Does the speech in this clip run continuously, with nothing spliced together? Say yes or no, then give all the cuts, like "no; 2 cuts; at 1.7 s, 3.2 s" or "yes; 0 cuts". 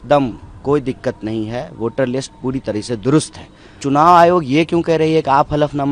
no; 1 cut; at 3.8 s